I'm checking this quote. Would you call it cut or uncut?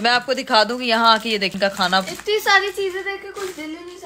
cut